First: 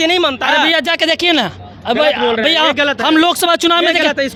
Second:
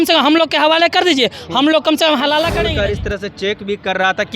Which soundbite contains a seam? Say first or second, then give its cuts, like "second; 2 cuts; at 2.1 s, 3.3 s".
second; 1 cut; at 2.5 s